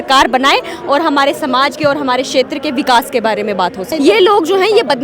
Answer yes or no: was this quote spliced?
yes